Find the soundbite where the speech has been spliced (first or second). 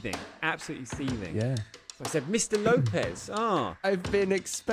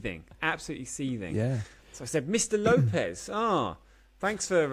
first